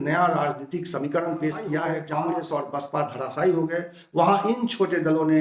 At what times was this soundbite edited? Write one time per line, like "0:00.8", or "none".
0:02.0